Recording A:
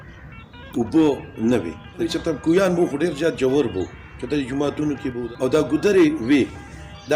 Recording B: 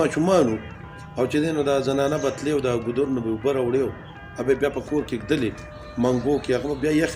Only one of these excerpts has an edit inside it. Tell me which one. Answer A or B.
A